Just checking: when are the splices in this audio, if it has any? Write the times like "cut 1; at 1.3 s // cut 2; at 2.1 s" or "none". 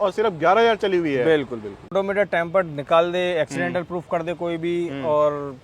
cut 1; at 1.9 s